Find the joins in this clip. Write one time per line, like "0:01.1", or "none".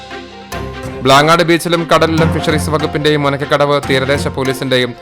0:00.9